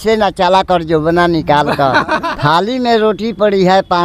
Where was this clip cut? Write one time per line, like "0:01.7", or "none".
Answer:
0:02.3